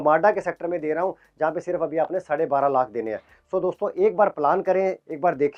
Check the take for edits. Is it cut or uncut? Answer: uncut